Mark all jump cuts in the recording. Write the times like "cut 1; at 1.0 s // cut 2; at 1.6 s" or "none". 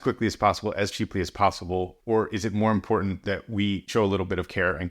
cut 1; at 1.9 s // cut 2; at 3.9 s